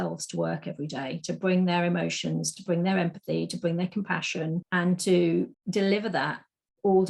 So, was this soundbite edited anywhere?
yes; 2 cuts; at 4.7 s, 5.6 s

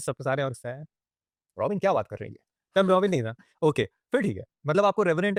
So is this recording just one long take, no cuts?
yes; 0 cuts

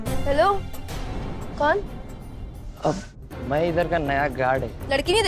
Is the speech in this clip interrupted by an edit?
no; 0 cuts

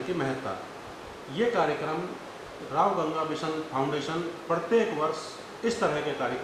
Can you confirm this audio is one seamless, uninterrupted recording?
yes; 0 cuts

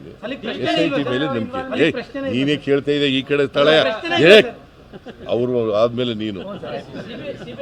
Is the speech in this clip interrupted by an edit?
no; 0 cuts

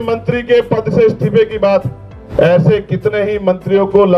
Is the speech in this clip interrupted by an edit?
no; 0 cuts

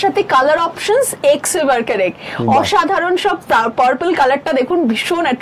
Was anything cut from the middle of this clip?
no; 0 cuts

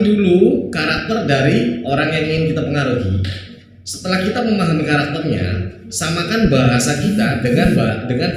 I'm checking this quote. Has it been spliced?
no; 0 cuts

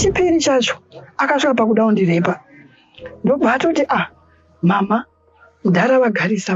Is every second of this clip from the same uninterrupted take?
yes; 0 cuts

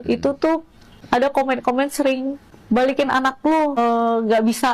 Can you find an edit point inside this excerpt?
yes; 3 cuts; at 1.0 s, 2.4 s, 3.8 s

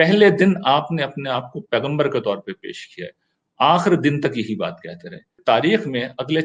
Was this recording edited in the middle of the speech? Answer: yes; 1 cut; at 5.4 s

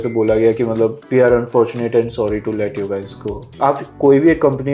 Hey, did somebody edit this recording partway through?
yes; 2 cuts; at 1.0 s, 3.6 s

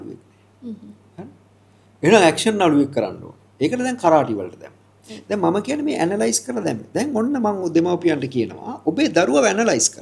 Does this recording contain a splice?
no; 0 cuts

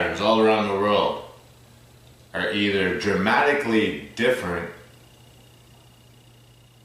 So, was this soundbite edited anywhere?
yes; 1 cut; at 0.9 s

